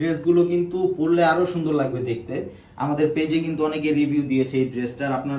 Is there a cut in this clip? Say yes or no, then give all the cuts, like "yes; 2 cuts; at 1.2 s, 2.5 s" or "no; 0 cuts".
no; 0 cuts